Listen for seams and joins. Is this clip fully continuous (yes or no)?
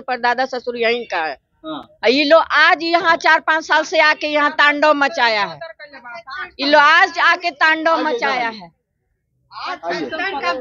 yes